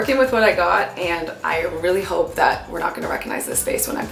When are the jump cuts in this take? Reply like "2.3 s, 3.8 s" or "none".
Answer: none